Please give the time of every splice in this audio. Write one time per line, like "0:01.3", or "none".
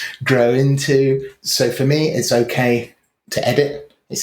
0:01.4

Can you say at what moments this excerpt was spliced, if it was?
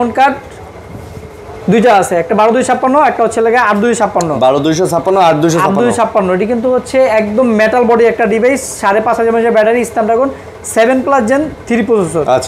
none

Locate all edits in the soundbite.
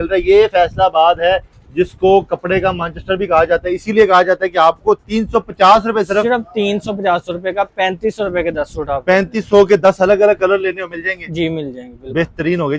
none

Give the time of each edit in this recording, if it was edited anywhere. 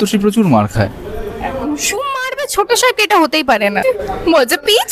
0:03.8

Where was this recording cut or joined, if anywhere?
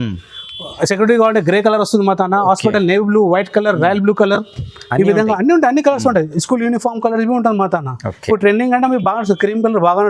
none

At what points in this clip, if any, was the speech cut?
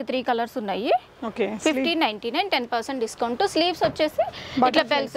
none

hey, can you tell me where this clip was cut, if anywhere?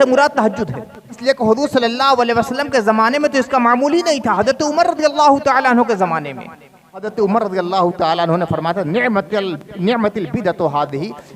0:01.1
0:07.1

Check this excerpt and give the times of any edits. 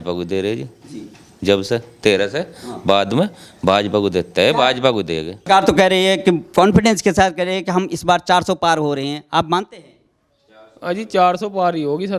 0:05.3

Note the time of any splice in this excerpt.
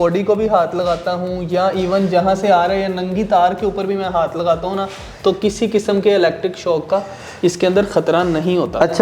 none

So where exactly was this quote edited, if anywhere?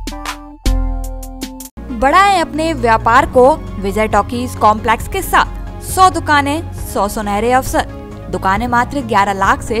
none

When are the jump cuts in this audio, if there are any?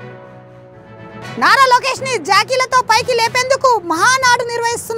0:01.3

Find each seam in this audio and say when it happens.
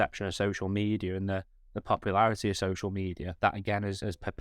0:03.3

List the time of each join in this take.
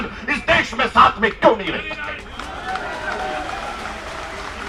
none

